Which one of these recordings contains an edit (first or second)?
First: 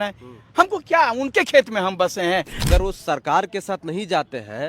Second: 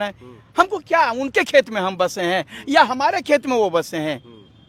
first